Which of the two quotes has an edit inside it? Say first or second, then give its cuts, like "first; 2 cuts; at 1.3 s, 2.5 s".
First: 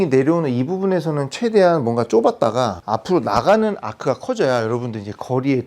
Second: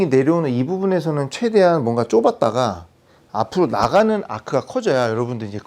first; 1 cut; at 2.8 s